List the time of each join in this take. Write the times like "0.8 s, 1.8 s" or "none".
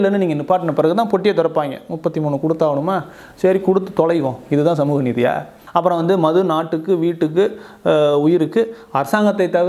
5.5 s